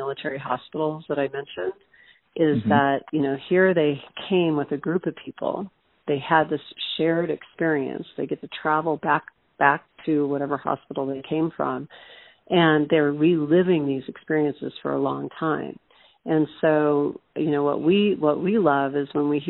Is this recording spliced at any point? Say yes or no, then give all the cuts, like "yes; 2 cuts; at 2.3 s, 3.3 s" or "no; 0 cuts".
no; 0 cuts